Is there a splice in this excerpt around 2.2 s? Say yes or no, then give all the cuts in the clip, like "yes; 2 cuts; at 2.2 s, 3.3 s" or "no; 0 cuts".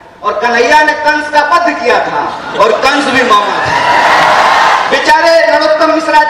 no; 1 cut; at 5.0 s